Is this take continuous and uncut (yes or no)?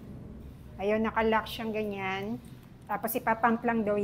no